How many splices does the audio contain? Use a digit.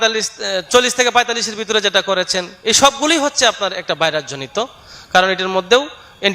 0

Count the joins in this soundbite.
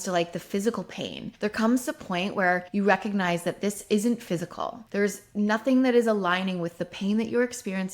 3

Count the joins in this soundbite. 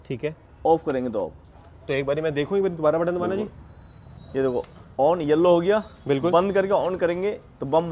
0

